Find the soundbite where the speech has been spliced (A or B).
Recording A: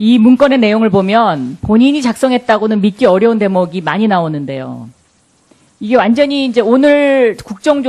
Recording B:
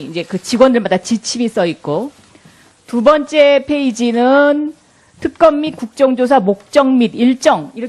A